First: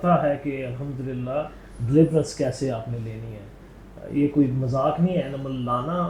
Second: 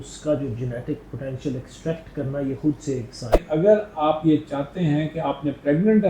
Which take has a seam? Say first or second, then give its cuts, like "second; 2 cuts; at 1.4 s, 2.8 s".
second; 1 cut; at 3.4 s